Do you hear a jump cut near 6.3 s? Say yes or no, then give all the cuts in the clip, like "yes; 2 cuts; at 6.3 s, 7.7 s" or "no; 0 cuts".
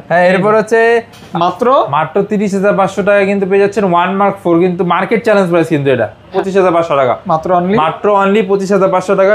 yes; 2 cuts; at 1.2 s, 6.3 s